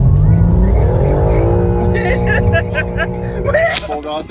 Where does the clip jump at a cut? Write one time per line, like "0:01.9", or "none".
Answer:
none